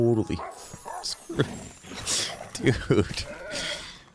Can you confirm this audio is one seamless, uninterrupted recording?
yes; 0 cuts

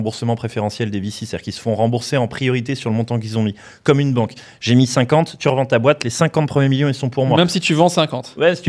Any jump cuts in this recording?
no; 0 cuts

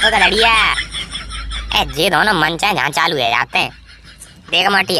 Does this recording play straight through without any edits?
yes; 0 cuts

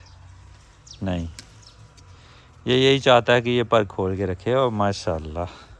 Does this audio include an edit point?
no; 0 cuts

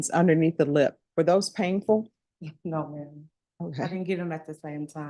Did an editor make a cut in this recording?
no; 0 cuts

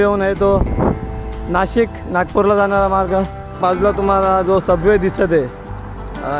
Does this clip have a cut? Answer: yes; 1 cut; at 3.6 s

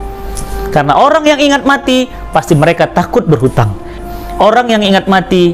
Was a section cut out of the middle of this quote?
yes; 1 cut; at 4.0 s

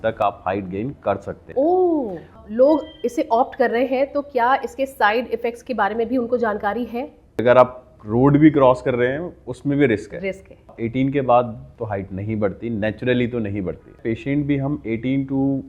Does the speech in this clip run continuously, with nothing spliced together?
no; 6 cuts; at 1.4 s, 2.4 s, 7.4 s, 10.7 s, 11.6 s, 13.9 s

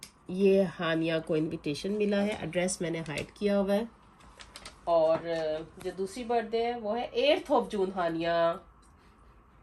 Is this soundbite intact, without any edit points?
yes; 0 cuts

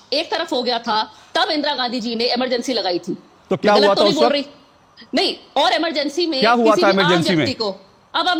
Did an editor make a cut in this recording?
no; 0 cuts

